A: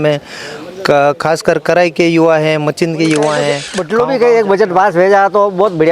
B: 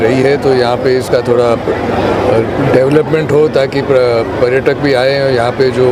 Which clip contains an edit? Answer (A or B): A